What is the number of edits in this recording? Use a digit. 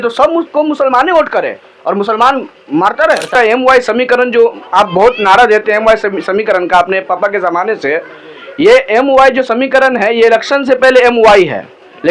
1